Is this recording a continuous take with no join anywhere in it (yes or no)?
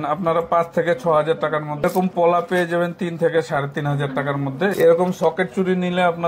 no